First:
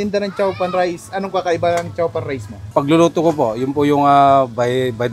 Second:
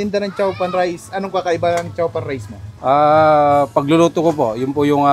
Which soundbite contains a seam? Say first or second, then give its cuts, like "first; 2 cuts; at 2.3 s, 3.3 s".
first; 1 cut; at 2.7 s